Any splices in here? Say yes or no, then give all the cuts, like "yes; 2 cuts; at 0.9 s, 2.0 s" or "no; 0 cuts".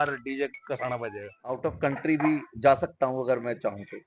yes; 1 cut; at 1.5 s